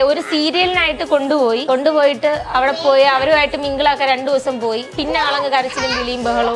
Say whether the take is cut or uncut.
cut